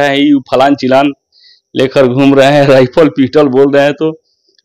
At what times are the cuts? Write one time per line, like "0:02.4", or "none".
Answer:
none